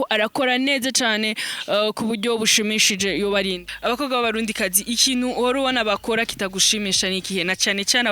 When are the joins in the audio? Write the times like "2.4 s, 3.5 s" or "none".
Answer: 3.7 s

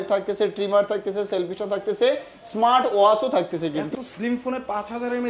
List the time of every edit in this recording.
3.8 s

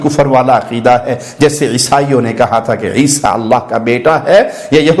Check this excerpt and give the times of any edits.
none

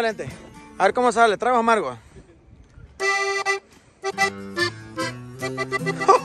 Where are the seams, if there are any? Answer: none

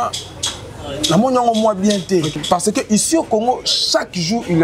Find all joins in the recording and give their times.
2.4 s

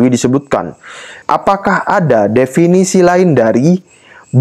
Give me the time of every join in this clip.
1.1 s

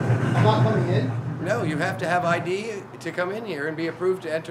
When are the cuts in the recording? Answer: none

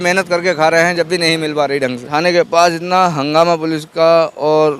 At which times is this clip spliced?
2.1 s

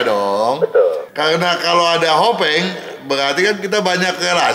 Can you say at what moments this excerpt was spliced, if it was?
1.1 s

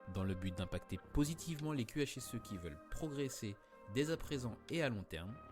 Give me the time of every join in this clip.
1.1 s

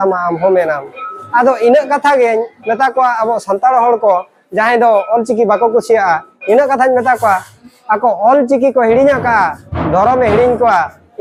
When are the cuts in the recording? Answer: none

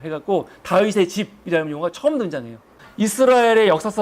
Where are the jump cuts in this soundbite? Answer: 2.9 s

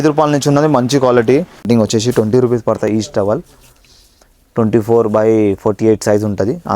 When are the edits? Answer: 1.6 s

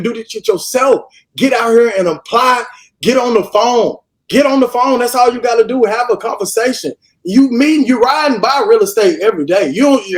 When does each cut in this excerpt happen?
none

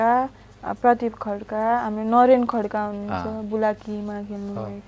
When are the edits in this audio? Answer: none

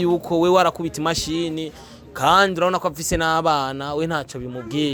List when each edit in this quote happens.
none

